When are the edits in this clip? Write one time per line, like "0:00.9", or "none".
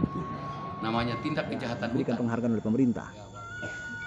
0:02.1